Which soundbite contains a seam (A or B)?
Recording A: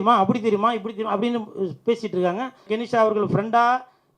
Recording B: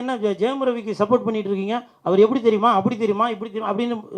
A